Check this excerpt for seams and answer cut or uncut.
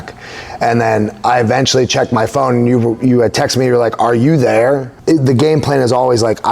cut